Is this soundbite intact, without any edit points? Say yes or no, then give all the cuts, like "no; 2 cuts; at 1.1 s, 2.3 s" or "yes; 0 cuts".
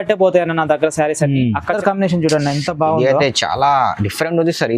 no; 1 cut; at 1.8 s